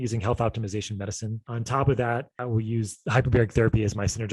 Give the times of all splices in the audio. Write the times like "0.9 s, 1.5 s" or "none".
1.5 s, 2.3 s